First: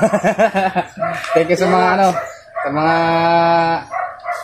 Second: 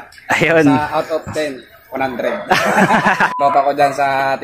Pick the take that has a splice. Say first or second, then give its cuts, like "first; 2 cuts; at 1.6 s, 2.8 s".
second; 1 cut; at 3.3 s